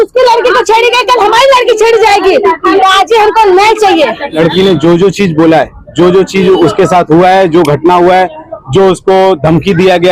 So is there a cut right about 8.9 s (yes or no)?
no